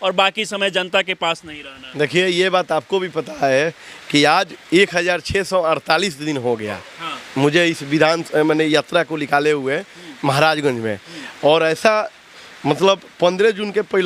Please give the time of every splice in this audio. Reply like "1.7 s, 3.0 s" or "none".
none